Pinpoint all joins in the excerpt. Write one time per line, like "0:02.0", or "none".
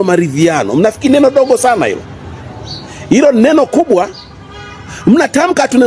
none